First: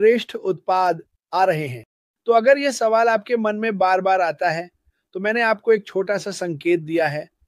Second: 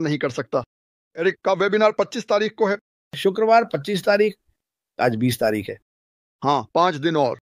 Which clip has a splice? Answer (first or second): second